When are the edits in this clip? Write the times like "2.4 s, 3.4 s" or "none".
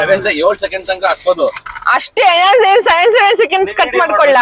none

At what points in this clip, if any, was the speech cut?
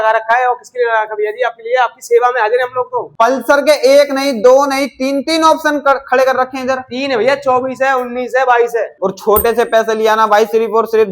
3.0 s, 8.9 s

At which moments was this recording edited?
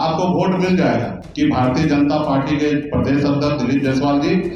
1.2 s

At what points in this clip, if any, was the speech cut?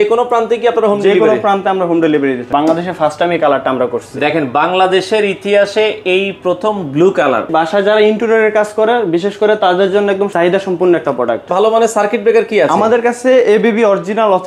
2.5 s, 7.5 s, 10.3 s, 11.5 s

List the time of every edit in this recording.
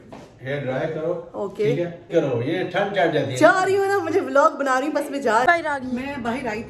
2.1 s, 5.5 s

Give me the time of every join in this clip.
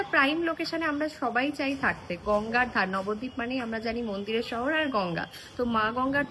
none

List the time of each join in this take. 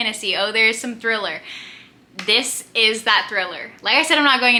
none

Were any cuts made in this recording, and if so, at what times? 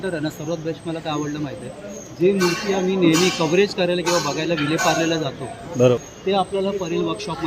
6.0 s

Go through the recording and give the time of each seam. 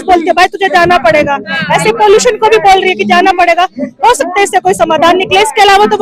none

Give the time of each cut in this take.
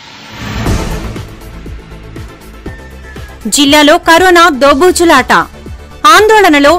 1.0 s

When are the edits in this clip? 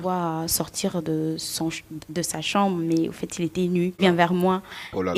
4.0 s

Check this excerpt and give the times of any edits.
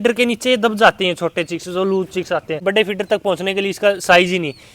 2.6 s

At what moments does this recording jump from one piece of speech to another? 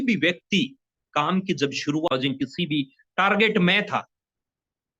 2.1 s

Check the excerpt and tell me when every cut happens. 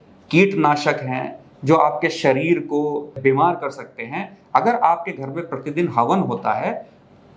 3.2 s

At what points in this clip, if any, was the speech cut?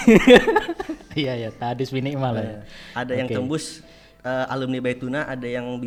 none

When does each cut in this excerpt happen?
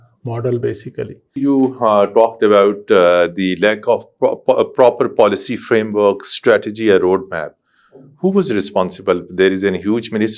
1.4 s

